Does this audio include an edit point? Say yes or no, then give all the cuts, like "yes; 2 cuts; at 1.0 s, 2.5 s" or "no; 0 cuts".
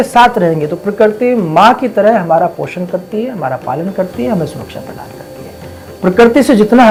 no; 0 cuts